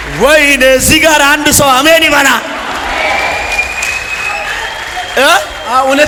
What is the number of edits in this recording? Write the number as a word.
zero